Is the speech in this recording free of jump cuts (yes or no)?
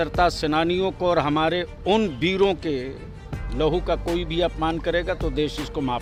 yes